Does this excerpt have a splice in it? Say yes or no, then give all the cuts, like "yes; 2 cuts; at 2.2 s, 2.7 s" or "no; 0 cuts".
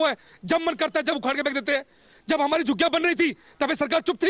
no; 0 cuts